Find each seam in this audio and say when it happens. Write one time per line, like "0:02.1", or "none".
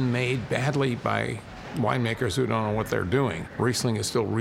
0:03.4